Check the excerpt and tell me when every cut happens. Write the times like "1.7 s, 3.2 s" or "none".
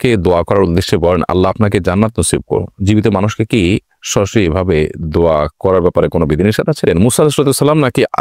6.8 s